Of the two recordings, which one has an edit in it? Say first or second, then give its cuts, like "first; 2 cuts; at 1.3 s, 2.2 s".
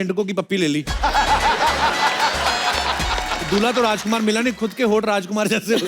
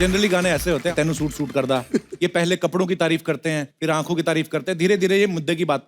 second; 2 cuts; at 0.9 s, 3.7 s